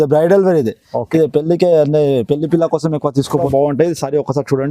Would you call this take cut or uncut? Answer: cut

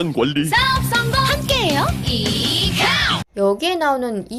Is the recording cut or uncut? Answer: uncut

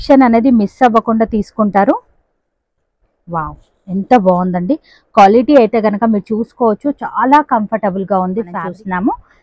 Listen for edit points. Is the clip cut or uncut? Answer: cut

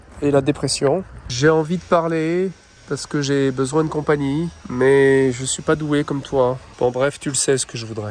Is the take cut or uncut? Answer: cut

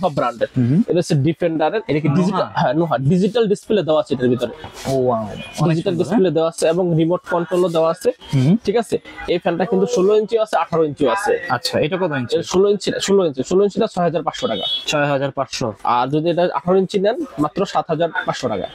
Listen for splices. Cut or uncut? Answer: uncut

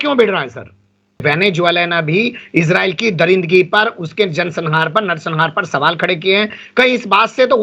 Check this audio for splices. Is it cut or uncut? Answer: cut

